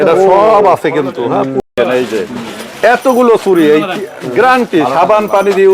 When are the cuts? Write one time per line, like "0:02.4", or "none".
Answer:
0:01.6